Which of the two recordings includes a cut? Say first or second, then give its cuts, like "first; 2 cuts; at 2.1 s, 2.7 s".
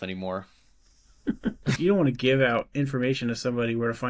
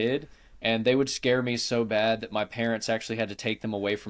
first; 1 cut; at 1.8 s